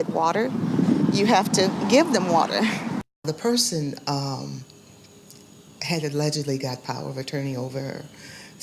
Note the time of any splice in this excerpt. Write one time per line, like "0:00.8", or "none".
0:02.9